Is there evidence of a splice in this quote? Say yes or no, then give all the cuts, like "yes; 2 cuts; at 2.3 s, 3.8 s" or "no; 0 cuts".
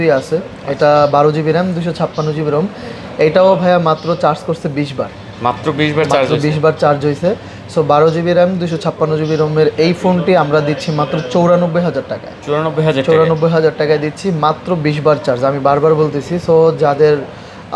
no; 0 cuts